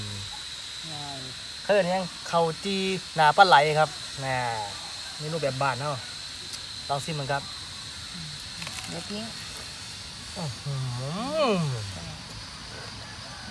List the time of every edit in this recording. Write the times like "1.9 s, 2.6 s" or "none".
none